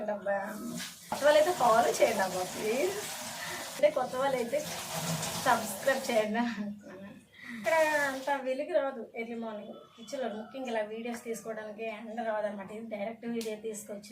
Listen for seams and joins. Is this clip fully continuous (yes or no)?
no